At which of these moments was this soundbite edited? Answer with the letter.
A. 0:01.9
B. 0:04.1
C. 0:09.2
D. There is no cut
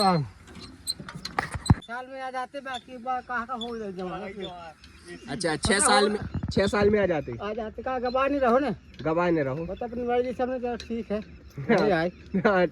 A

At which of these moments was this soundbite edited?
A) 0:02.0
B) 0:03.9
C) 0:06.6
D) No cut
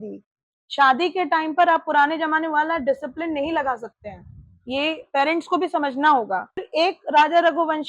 C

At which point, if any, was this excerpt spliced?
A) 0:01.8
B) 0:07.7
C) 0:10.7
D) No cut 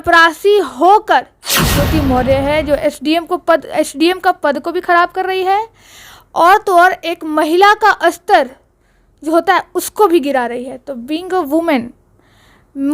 A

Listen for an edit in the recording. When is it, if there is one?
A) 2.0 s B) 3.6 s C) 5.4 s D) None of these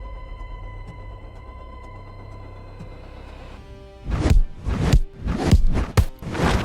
B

